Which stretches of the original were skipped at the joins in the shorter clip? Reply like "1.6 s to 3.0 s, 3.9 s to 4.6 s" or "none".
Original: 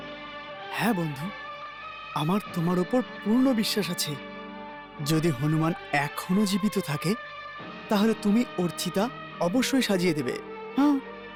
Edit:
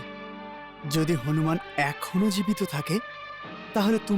none